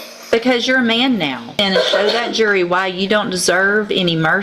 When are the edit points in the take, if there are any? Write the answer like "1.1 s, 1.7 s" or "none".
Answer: 1.6 s